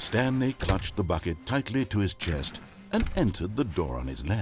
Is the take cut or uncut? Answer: uncut